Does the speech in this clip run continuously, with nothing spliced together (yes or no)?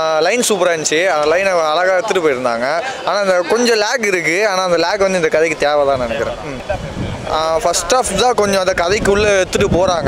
yes